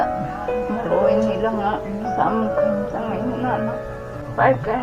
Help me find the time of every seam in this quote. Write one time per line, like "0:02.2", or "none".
none